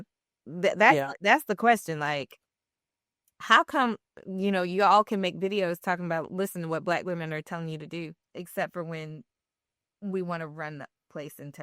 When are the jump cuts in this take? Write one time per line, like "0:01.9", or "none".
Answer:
0:08.2

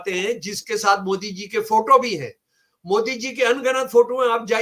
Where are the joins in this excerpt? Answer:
none

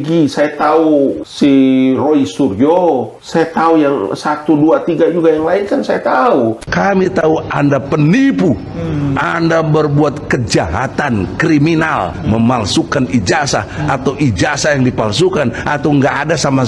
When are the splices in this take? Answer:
0:01.2
0:03.2
0:06.6

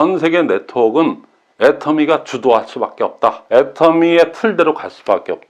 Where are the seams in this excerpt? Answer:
0:03.4

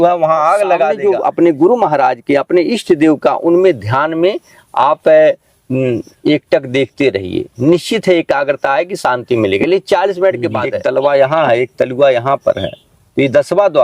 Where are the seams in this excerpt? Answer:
0:01.0
0:10.7

